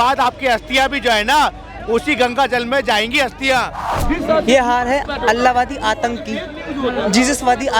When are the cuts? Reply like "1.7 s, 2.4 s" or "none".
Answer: 3.9 s